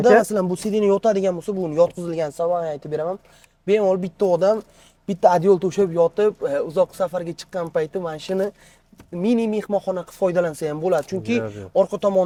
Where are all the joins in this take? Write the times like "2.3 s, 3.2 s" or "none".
none